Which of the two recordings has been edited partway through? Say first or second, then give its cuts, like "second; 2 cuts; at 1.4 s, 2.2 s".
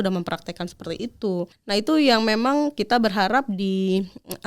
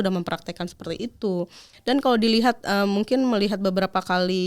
first; 1 cut; at 1.5 s